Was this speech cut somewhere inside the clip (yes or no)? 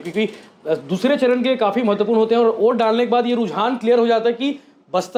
no